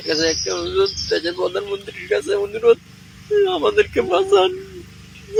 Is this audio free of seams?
yes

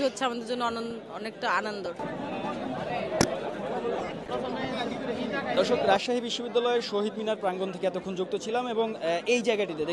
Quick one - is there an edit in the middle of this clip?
no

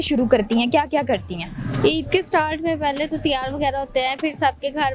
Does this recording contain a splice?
no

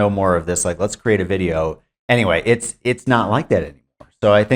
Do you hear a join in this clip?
yes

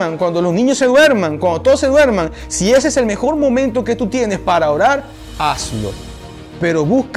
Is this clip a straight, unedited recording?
yes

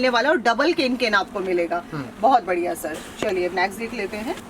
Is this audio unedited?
yes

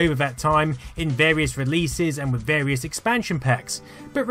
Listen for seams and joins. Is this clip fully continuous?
no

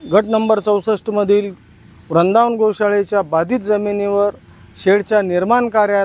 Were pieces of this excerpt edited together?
no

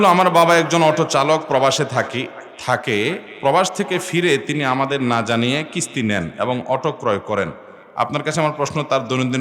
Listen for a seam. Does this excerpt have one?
no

